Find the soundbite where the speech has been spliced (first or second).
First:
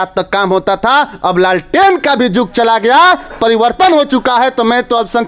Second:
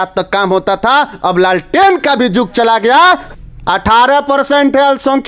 second